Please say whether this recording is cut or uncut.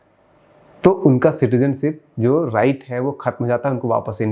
uncut